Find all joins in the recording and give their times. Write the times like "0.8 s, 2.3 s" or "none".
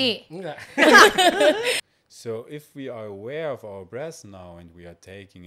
1.8 s